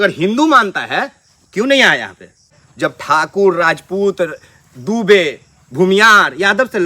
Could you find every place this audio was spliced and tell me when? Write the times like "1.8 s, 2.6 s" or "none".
2.6 s

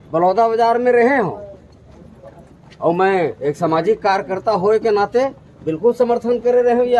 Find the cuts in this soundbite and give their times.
none

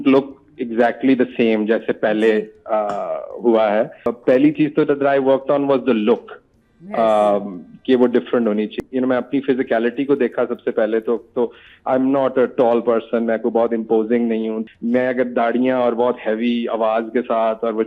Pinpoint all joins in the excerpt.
4.1 s, 8.8 s, 14.6 s

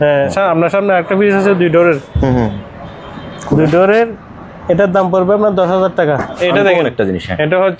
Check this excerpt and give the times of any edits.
6.4 s

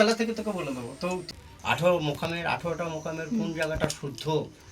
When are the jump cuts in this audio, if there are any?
1.2 s

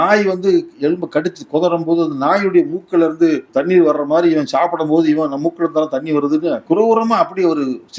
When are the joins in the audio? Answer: 3.5 s, 6.6 s

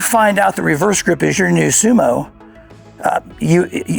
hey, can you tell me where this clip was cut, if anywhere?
none

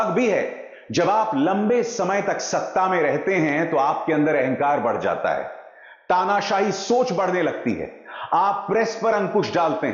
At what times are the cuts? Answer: none

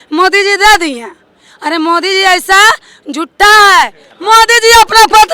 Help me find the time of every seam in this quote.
4.1 s

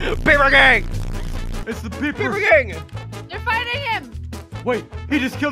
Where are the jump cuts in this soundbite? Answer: 1.5 s

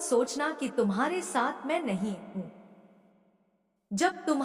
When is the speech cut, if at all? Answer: none

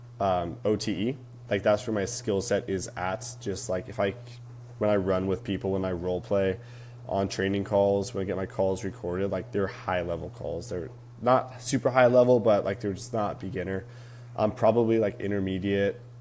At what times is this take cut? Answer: none

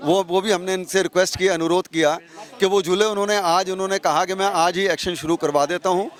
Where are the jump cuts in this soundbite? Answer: none

